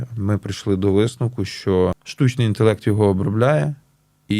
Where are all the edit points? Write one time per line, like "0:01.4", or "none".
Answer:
0:02.1

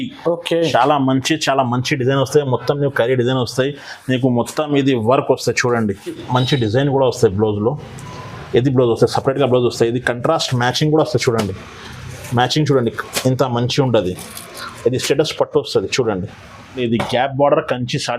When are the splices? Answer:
0:06.2
0:16.6

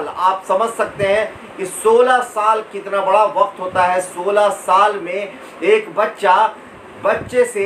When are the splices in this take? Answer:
none

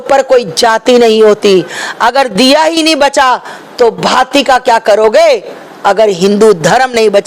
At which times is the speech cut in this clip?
none

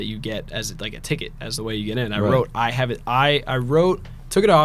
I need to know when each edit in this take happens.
none

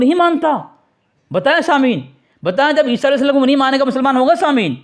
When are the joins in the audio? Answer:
none

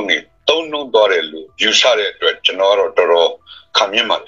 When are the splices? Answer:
none

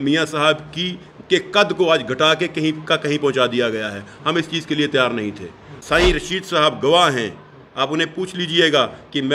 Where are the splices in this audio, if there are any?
0:05.7

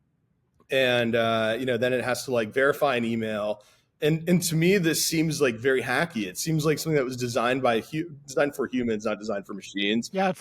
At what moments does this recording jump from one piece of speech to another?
none

